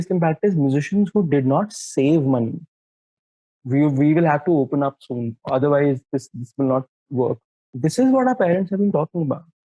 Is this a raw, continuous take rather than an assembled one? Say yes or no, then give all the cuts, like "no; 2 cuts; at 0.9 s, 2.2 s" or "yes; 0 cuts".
no; 2 cuts; at 3.2 s, 7.7 s